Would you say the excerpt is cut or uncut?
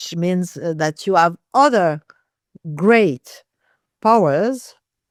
uncut